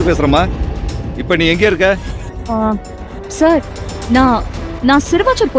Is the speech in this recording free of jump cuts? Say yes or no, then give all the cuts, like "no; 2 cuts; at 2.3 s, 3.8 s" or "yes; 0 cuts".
yes; 0 cuts